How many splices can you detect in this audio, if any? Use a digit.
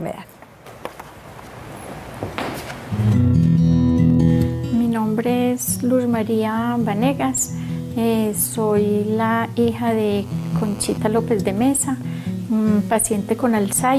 1